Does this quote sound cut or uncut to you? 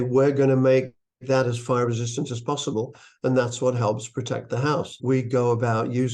cut